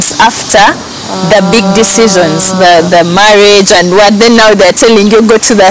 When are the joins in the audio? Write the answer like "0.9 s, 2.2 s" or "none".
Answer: none